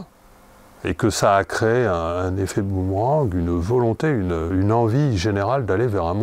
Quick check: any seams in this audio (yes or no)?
yes